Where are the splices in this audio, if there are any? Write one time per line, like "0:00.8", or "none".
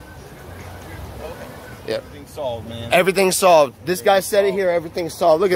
0:02.2